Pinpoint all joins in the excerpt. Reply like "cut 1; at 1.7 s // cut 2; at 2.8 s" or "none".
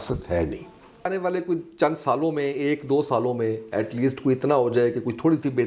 cut 1; at 1.1 s